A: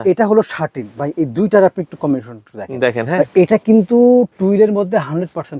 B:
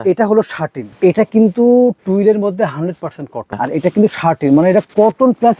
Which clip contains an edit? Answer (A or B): B